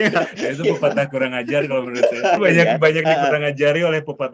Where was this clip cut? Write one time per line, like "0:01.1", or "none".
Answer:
0:02.4